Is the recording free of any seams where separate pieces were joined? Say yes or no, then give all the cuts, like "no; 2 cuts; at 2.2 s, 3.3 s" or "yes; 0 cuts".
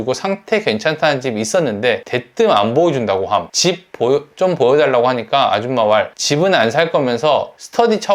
yes; 0 cuts